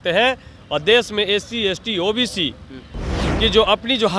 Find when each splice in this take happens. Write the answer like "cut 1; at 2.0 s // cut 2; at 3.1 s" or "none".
none